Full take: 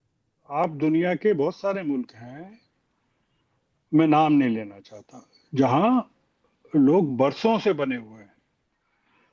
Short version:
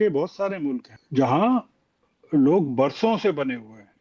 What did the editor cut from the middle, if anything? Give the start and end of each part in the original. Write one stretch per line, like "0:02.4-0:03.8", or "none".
0:02.2-0:05.4